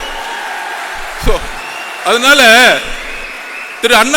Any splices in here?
no; 0 cuts

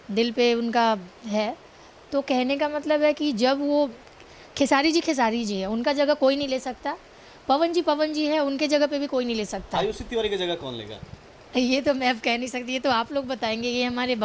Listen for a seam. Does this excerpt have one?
no; 0 cuts

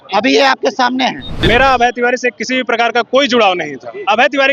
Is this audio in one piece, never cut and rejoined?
no; 1 cut; at 1.3 s

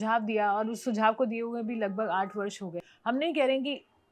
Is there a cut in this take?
yes; 1 cut; at 2.9 s

